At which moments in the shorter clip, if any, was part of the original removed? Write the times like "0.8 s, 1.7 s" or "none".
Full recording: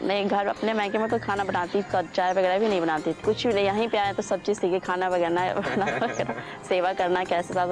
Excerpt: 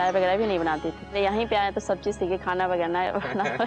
1.0 s